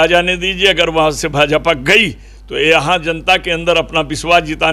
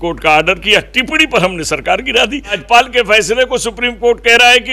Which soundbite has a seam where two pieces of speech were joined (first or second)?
second